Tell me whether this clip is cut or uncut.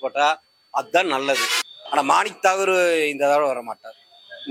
cut